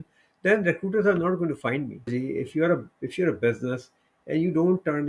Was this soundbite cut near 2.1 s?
yes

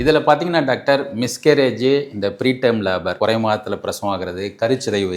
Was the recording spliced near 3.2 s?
yes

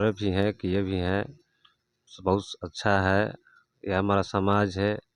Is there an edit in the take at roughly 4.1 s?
no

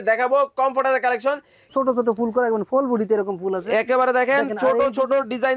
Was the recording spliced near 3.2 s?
no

